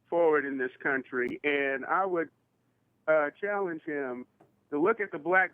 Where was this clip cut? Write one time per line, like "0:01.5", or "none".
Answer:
none